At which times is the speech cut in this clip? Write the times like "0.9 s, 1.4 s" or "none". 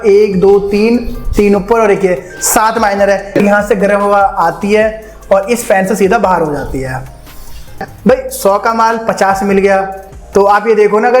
3.4 s, 7.3 s